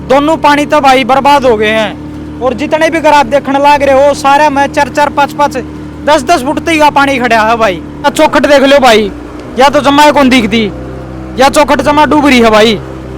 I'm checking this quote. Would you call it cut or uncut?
cut